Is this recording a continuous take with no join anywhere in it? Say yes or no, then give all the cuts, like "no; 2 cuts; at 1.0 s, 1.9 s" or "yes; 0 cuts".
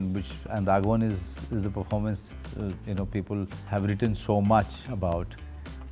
no; 1 cut; at 3.6 s